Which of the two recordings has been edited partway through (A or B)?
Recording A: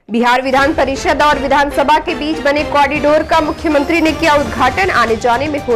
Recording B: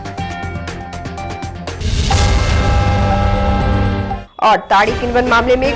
B